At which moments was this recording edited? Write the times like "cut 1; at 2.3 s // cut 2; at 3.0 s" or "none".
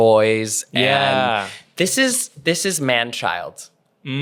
none